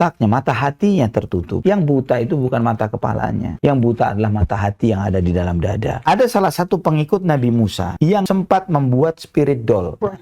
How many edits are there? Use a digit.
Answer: 2